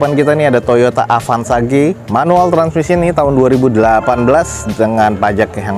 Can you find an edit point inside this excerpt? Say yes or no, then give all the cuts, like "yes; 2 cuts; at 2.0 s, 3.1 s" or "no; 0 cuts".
no; 0 cuts